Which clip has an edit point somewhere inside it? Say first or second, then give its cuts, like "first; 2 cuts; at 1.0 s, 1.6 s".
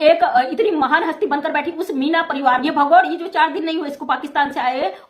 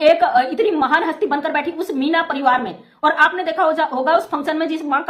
first; 1 cut; at 2.6 s